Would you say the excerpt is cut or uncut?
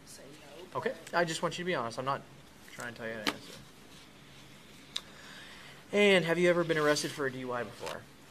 uncut